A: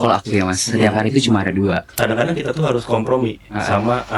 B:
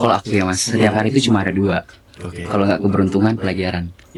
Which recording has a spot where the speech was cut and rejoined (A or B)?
A